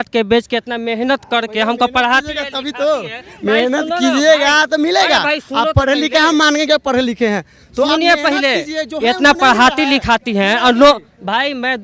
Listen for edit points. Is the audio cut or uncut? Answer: uncut